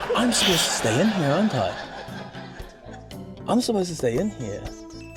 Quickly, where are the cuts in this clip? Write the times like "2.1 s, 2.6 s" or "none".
none